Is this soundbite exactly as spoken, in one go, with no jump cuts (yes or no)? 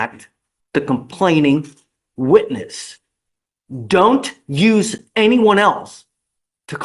yes